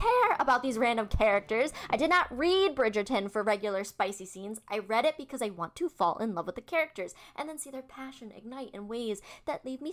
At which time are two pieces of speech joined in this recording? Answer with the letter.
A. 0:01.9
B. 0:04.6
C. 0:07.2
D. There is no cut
D